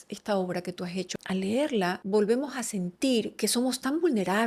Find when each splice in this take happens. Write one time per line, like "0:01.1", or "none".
0:01.1
0:02.0
0:03.3